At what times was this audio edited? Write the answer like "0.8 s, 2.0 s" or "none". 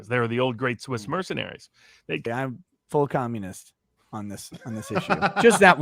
2.2 s

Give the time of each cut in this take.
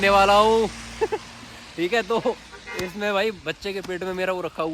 none

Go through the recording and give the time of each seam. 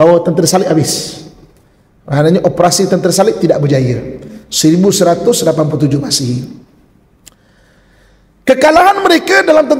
none

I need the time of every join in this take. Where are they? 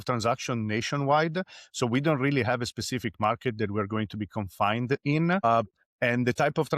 5.4 s

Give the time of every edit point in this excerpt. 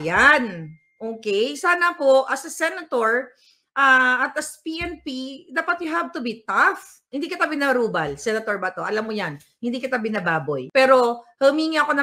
7.0 s, 10.6 s

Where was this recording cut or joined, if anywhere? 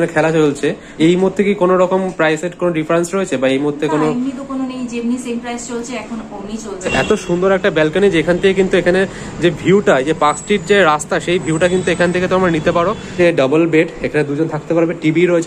1.1 s, 6.9 s, 13.1 s

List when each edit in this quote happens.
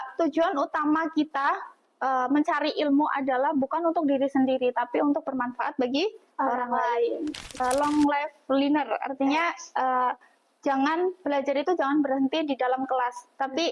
7.6 s

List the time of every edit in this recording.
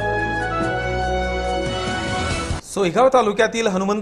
none

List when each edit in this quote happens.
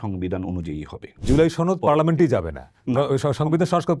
1.2 s

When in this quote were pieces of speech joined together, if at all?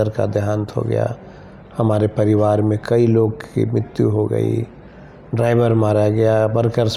none

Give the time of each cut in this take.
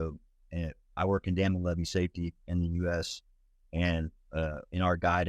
none

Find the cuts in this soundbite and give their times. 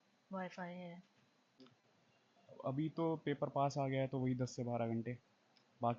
1.7 s

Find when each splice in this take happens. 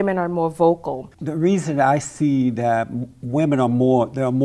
1.2 s

